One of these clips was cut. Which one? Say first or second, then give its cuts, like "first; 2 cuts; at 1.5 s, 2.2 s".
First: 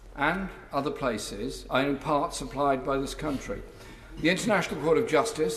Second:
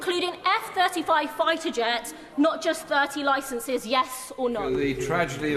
second; 1 cut; at 4.6 s